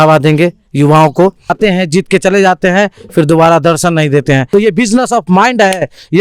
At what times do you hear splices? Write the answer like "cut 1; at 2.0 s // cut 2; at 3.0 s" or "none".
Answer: cut 1; at 1.6 s // cut 2; at 4.4 s